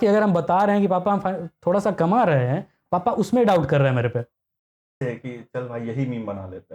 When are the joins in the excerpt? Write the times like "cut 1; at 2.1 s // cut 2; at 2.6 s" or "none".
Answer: cut 1; at 4.8 s